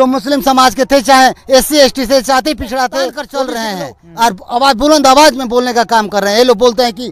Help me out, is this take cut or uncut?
cut